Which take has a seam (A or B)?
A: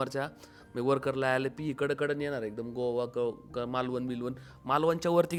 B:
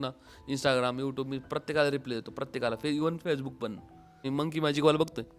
B